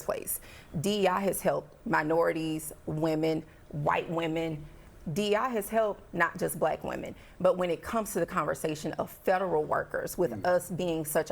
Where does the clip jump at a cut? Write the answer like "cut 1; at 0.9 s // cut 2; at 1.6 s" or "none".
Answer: cut 1; at 1.0 s